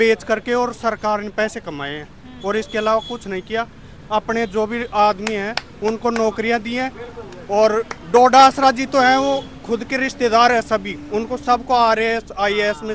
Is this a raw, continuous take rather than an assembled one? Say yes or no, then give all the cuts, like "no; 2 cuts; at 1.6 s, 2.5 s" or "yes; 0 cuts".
yes; 0 cuts